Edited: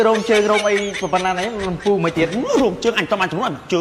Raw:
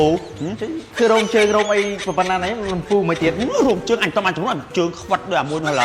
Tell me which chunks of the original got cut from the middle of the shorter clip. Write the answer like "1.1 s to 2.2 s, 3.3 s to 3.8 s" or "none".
none